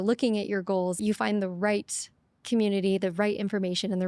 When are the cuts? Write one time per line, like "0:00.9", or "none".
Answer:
0:01.0